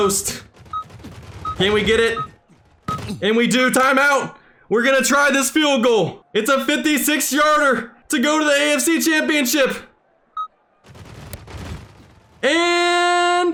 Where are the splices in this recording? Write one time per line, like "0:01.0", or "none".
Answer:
none